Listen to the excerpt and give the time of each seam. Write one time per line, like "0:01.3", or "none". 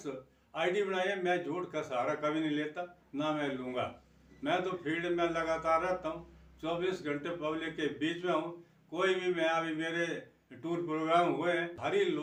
none